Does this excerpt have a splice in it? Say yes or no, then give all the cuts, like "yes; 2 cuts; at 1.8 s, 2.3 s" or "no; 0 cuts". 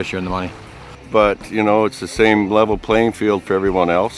yes; 1 cut; at 1.0 s